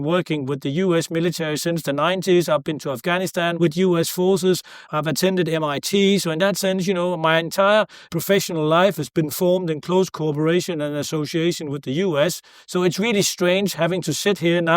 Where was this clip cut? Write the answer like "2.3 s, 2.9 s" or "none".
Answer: 3.5 s, 4.9 s, 8.1 s